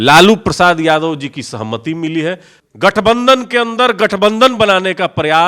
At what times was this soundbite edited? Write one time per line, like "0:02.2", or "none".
0:02.5